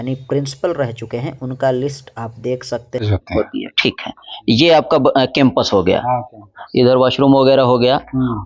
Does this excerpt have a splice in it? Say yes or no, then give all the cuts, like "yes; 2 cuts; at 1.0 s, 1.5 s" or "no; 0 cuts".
yes; 1 cut; at 3.0 s